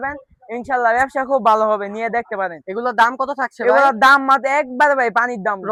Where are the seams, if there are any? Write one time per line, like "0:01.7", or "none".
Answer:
none

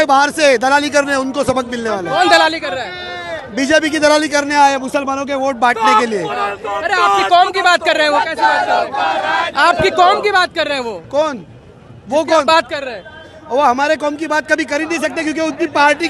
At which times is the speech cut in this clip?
none

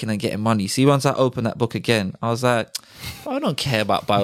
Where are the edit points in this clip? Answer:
none

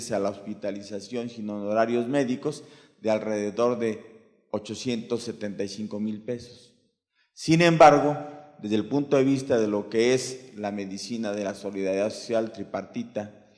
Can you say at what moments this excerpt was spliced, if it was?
0:11.7

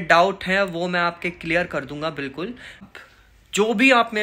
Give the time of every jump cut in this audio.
0:02.8

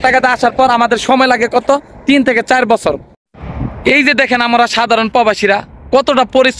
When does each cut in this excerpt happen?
0:03.2

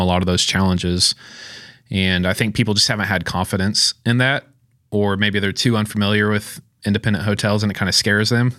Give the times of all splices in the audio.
none

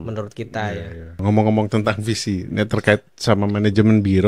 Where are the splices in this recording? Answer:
0:01.2
0:03.1

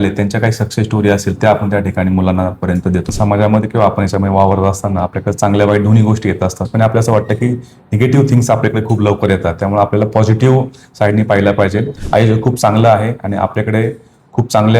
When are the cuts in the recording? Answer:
0:03.1
0:06.6
0:11.9

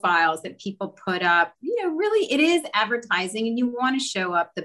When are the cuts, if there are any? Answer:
none

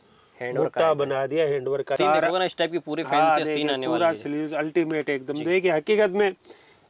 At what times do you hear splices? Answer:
0:02.0

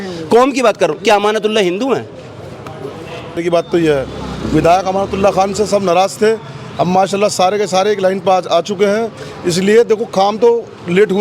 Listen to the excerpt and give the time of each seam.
0:03.4

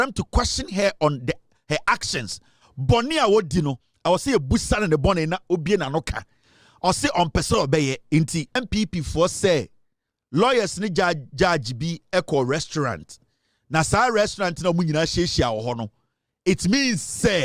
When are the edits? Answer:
0:08.6

